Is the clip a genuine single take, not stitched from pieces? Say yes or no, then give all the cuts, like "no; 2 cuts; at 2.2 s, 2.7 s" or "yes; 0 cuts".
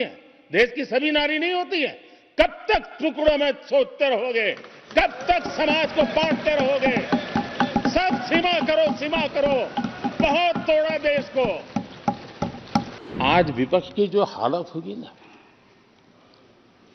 no; 1 cut; at 13.0 s